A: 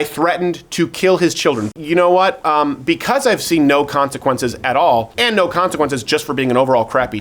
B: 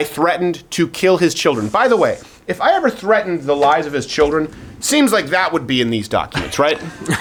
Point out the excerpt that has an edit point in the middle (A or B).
A